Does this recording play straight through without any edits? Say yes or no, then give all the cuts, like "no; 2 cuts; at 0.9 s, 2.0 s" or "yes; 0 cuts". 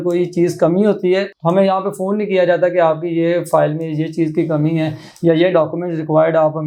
yes; 0 cuts